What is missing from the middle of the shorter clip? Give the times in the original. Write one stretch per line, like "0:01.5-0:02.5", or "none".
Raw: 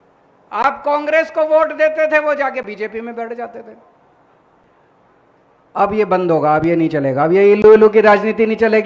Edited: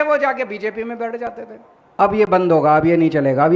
0:04.2-0:05.8